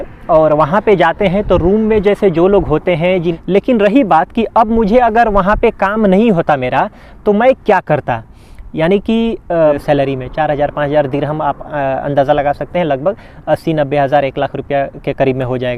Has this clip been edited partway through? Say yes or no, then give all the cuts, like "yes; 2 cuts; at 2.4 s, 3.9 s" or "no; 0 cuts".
yes; 2 cuts; at 3.3 s, 9.5 s